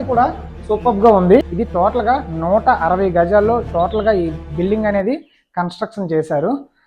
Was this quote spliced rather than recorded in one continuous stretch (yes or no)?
yes